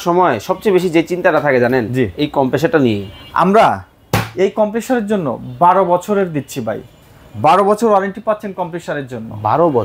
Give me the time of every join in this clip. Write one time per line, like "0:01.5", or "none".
none